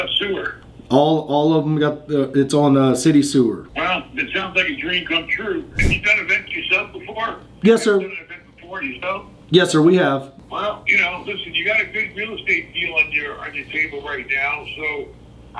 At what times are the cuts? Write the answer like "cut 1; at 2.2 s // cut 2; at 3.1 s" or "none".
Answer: cut 1; at 5.9 s // cut 2; at 10.3 s